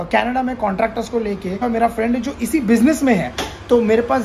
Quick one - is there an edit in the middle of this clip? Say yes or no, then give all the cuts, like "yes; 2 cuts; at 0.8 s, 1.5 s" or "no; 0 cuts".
yes; 1 cut; at 1.6 s